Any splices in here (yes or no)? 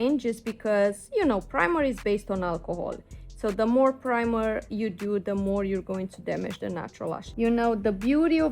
yes